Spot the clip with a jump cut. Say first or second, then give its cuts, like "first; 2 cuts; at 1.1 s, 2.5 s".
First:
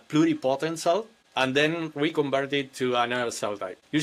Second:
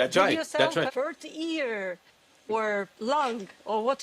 second; 2 cuts; at 0.9 s, 2.5 s